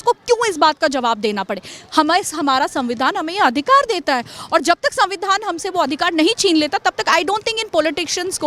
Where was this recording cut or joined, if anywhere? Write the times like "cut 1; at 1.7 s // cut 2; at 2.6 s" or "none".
none